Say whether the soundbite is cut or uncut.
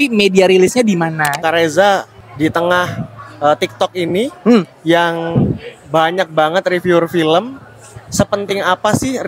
cut